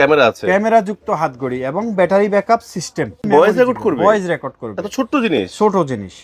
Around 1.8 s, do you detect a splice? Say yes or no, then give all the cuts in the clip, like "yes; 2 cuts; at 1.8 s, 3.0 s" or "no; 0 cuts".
no; 1 cut; at 3.3 s